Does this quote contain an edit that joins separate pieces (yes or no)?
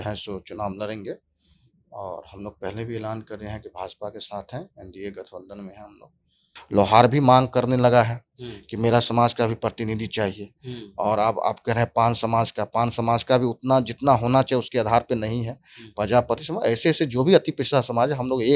yes